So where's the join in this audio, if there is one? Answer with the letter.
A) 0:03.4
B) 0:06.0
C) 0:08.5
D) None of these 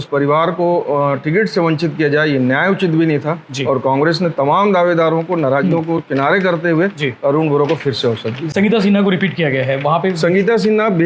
D